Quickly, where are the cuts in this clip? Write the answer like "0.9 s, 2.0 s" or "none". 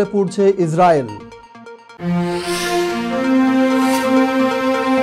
none